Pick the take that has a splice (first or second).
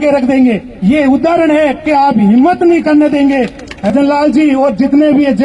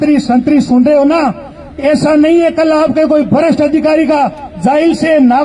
first